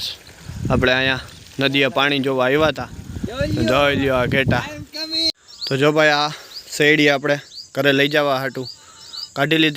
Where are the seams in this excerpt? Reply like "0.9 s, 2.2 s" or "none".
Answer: 5.3 s